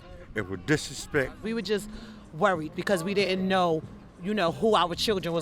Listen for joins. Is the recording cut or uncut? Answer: cut